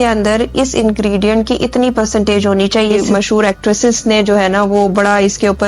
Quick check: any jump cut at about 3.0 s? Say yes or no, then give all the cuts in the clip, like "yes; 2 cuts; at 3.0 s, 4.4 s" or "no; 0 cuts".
yes; 1 cut; at 3.0 s